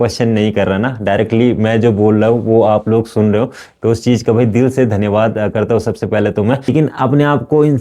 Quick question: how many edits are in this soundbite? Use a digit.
1